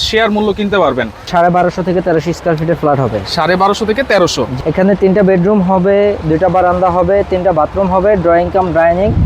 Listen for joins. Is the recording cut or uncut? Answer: cut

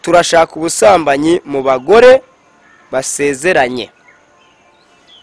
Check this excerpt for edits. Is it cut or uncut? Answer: uncut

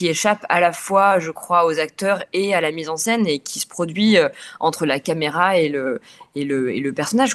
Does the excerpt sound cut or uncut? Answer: uncut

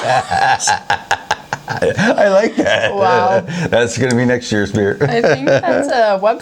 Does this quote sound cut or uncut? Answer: uncut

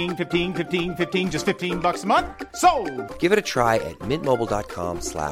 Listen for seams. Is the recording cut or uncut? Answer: uncut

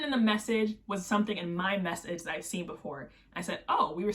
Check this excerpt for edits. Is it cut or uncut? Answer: uncut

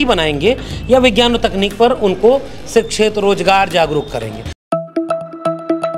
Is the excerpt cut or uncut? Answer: cut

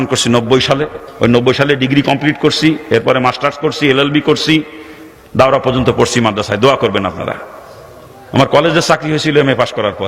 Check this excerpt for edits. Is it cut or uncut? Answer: cut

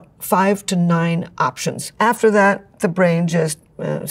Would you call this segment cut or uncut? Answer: uncut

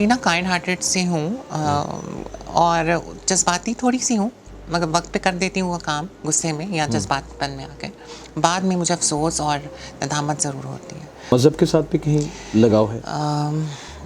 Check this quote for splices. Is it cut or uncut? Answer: cut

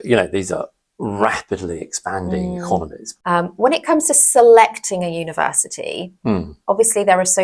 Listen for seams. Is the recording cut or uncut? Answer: cut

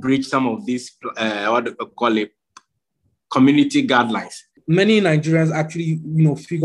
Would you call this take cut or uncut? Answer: cut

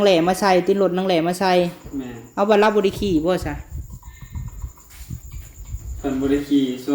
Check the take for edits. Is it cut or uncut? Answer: uncut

